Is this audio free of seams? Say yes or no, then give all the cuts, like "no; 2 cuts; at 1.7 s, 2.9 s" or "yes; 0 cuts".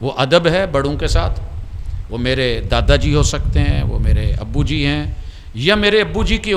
yes; 0 cuts